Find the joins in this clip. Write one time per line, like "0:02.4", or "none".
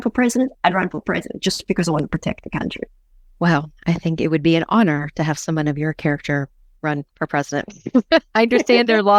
none